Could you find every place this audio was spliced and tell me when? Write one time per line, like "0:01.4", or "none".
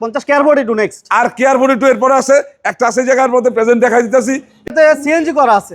0:04.7